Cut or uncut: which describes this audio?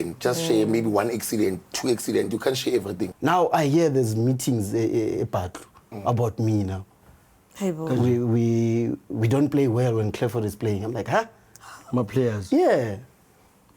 cut